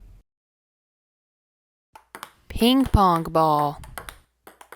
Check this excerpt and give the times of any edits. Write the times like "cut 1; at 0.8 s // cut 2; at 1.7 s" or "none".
cut 1; at 3.8 s